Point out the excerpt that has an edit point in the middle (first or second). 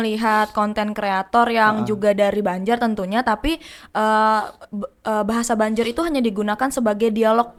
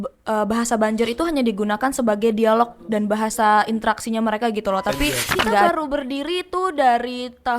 second